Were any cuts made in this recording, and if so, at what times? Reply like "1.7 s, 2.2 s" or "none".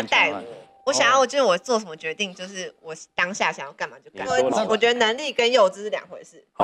4.6 s